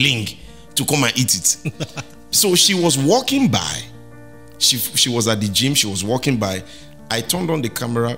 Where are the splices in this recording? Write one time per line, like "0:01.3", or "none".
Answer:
none